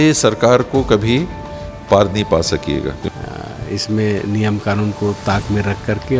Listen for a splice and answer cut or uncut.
cut